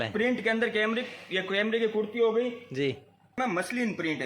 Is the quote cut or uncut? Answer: cut